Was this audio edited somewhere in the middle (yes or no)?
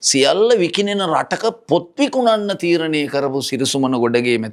no